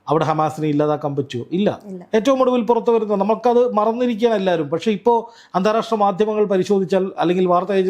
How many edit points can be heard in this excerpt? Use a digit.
0